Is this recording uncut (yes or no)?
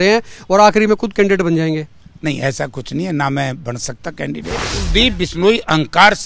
no